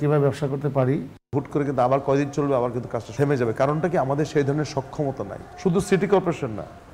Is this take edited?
yes; 3 cuts; at 1.2 s, 3.1 s, 5.4 s

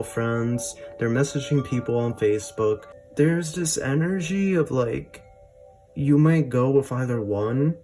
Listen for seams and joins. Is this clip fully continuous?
no; 1 cut; at 3.0 s

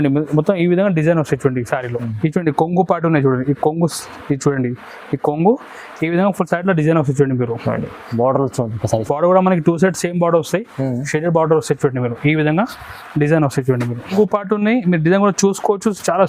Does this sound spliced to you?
yes; 2 cuts; at 2.1 s, 14.1 s

